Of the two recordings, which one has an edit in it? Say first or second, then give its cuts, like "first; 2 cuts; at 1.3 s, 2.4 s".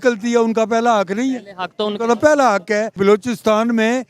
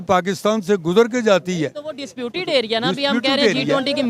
first; 1 cut; at 3.0 s